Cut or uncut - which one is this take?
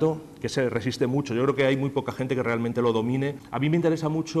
cut